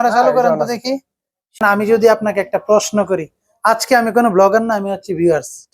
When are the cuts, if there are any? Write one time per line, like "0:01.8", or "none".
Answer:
0:01.6